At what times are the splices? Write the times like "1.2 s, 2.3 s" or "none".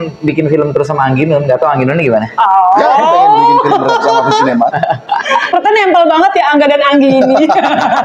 5.5 s